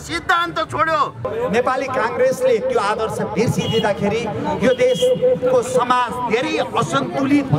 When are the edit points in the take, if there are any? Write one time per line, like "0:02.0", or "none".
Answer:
0:01.3